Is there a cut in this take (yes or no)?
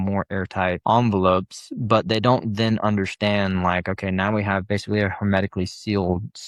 no